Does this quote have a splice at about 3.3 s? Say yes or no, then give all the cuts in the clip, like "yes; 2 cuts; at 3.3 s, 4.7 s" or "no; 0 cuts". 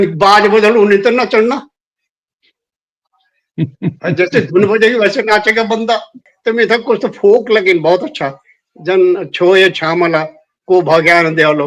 no; 1 cut; at 6.3 s